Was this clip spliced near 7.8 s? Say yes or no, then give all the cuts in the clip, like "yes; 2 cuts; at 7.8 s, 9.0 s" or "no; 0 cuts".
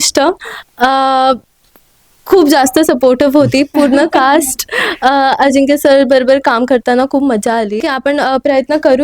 yes; 1 cut; at 7.8 s